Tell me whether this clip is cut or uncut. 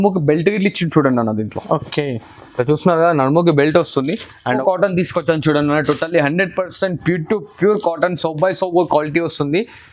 cut